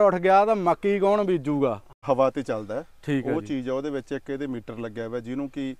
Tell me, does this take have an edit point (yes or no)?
yes